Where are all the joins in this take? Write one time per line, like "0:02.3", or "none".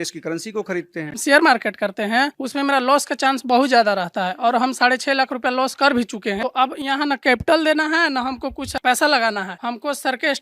0:01.2
0:06.4